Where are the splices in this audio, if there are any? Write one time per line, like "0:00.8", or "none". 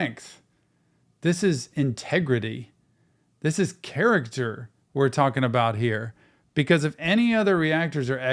none